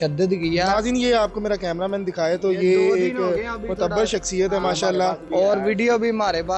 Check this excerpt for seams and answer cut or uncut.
cut